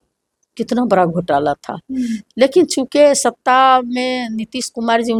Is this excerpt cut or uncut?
uncut